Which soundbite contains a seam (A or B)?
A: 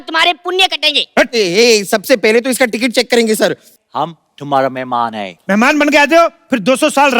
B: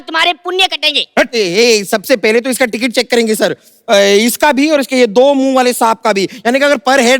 A